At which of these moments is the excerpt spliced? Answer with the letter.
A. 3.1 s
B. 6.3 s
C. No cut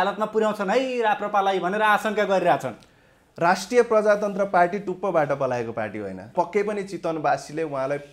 B